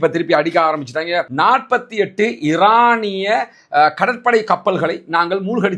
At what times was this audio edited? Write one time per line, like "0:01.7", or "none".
0:01.3